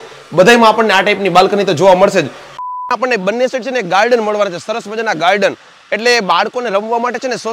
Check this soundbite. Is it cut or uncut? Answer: cut